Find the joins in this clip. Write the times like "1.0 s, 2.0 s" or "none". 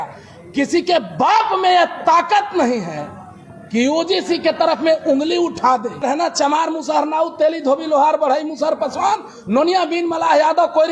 6.0 s